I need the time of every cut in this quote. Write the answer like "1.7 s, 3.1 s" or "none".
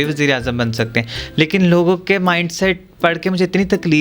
none